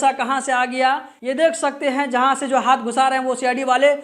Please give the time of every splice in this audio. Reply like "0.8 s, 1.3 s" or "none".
1.1 s